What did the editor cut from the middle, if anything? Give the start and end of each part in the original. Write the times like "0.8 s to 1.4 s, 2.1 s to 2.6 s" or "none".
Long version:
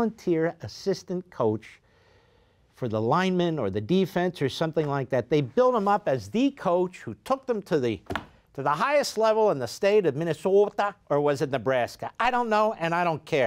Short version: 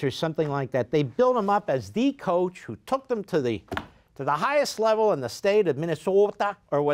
none